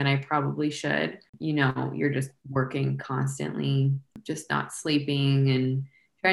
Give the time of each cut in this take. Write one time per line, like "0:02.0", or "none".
0:01.3
0:04.2